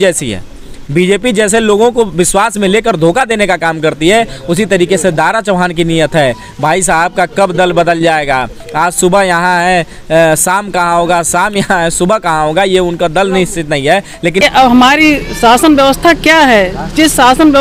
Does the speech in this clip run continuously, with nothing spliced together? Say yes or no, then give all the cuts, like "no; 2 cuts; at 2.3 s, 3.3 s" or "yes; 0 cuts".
no; 1 cut; at 14.4 s